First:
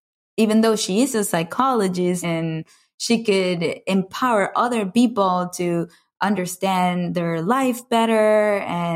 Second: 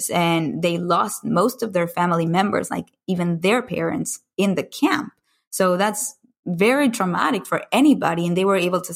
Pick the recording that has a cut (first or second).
first